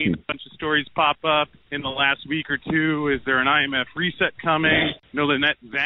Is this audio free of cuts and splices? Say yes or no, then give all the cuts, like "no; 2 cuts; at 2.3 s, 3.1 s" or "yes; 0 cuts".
no; 2 cuts; at 1.6 s, 4.9 s